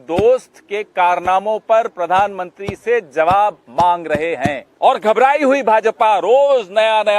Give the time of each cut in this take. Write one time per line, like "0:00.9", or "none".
0:04.6

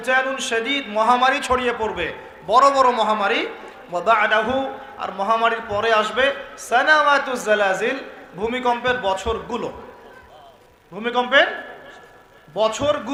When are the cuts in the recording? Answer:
none

